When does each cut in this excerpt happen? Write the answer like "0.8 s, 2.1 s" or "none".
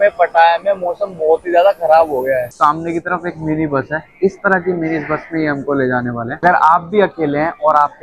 2.5 s, 6.4 s